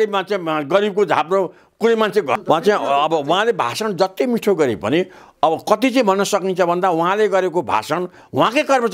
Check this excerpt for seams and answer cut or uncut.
cut